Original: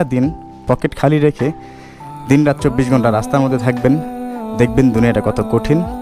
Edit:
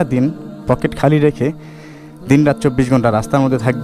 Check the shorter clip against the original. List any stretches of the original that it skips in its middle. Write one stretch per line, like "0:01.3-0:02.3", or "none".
none